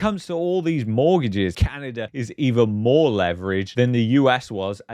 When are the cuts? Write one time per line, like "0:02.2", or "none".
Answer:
0:01.6